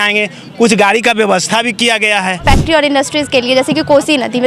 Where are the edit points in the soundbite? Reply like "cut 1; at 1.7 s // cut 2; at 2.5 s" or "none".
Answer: cut 1; at 2.4 s